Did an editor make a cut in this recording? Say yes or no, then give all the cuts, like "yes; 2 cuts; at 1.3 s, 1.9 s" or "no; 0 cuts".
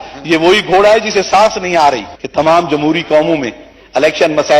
yes; 1 cut; at 2.1 s